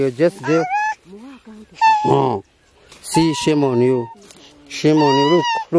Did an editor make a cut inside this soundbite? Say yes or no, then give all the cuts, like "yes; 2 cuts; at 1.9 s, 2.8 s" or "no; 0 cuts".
no; 0 cuts